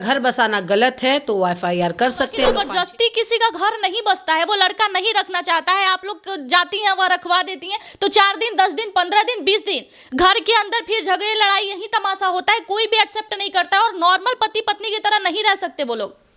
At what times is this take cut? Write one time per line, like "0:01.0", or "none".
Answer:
0:02.6